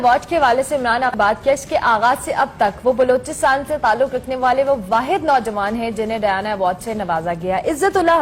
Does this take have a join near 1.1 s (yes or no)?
yes